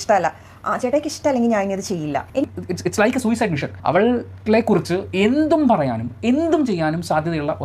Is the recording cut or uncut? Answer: cut